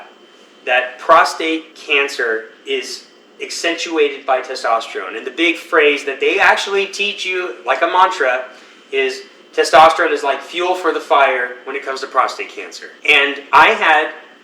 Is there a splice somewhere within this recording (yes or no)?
yes